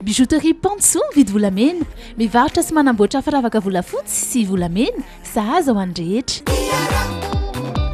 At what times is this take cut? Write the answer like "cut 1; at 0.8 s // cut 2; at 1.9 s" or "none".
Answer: none